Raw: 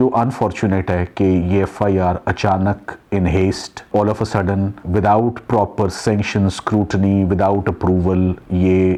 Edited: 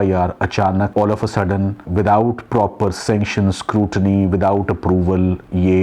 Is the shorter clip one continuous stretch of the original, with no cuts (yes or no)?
no